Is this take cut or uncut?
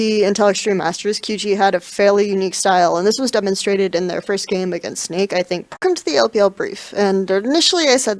uncut